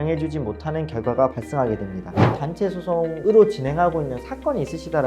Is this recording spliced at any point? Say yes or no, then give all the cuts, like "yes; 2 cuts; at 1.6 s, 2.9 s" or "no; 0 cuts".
yes; 1 cut; at 2.3 s